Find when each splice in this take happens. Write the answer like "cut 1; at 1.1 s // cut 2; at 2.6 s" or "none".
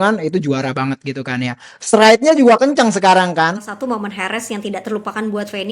cut 1; at 3.5 s